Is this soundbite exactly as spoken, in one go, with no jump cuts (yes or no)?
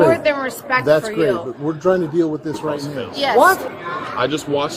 no